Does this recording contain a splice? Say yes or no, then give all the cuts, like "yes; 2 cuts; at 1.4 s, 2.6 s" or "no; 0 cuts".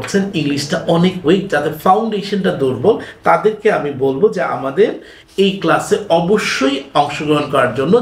no; 0 cuts